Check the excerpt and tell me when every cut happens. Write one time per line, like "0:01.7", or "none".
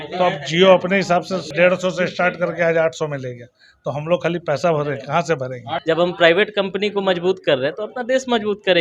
0:01.5
0:05.7